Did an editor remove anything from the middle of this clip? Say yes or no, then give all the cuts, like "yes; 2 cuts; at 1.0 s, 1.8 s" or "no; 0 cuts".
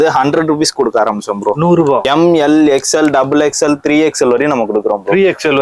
yes; 1 cut; at 2.1 s